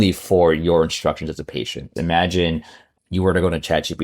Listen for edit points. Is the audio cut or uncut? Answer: cut